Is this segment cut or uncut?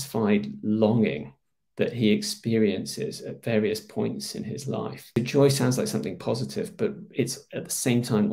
cut